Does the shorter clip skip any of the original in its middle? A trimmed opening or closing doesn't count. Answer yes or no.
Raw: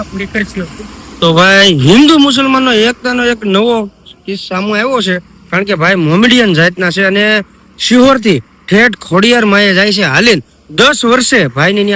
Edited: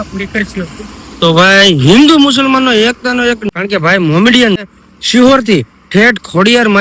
yes